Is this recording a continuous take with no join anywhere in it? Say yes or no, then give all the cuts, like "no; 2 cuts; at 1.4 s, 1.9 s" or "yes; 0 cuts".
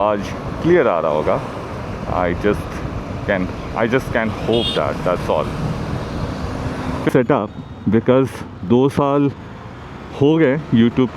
no; 1 cut; at 7.1 s